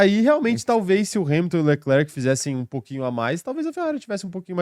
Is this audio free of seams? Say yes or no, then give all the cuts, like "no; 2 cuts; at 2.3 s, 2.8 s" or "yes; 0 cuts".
yes; 0 cuts